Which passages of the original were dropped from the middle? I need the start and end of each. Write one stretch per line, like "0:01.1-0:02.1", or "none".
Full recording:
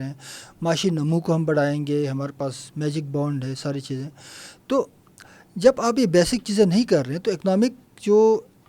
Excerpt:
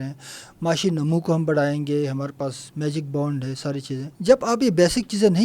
0:04.1-0:05.5